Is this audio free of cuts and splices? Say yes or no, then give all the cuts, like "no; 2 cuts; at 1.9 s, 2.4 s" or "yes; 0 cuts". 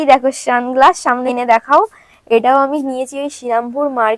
no; 1 cut; at 1.3 s